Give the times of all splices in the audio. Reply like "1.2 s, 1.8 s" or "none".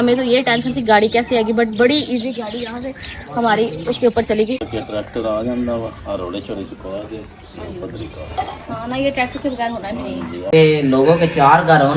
4.7 s, 10.4 s